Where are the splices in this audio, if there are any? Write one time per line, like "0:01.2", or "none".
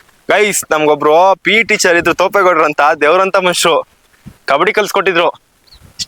none